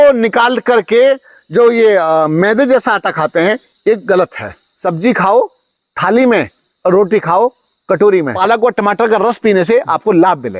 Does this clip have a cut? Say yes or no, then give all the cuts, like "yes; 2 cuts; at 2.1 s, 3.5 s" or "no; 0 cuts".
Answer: yes; 2 cuts; at 4.7 s, 8.3 s